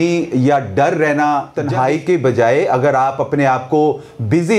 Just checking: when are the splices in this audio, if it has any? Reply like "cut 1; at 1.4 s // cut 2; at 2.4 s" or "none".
cut 1; at 1.6 s